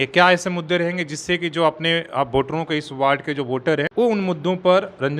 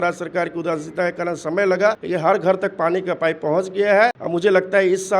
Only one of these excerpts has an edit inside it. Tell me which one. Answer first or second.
second